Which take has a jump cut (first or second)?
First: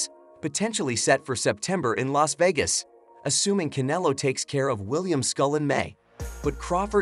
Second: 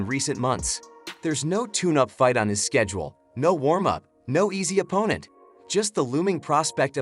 second